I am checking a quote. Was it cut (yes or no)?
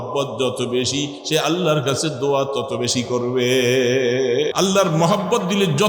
yes